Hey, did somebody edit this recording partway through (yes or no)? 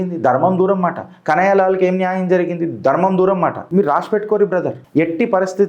yes